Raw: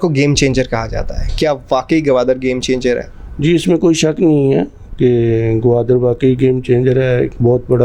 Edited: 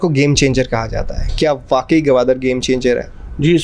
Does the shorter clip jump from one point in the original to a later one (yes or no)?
no